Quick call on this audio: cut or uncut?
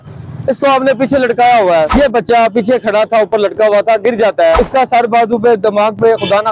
cut